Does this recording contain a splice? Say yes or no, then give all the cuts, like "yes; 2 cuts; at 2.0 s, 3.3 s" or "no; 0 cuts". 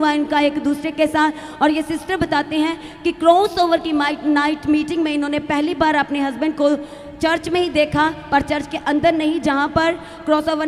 no; 0 cuts